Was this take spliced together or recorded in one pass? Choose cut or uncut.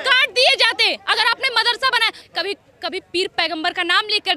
cut